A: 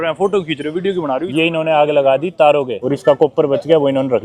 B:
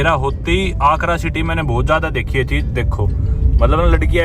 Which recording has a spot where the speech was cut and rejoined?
A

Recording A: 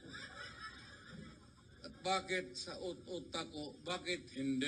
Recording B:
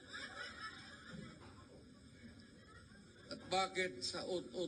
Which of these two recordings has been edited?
A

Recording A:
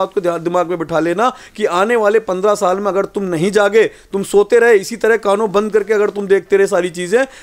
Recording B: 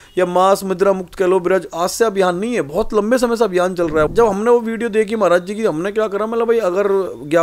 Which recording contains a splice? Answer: B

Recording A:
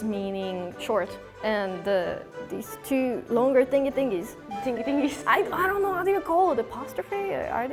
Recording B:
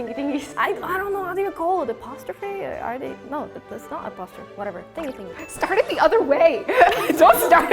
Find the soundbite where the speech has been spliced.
B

